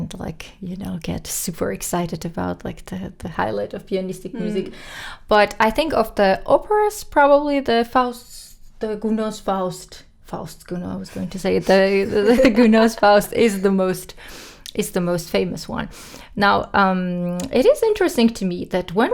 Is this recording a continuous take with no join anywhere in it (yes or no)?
yes